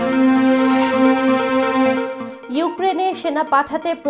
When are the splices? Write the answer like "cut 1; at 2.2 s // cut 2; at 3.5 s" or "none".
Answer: cut 1; at 2.3 s